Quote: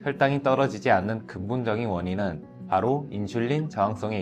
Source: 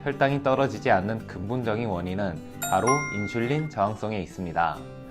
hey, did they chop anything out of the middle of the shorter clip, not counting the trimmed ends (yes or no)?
no